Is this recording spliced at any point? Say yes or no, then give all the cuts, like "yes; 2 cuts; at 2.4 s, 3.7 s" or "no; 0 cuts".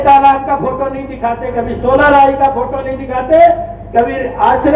no; 0 cuts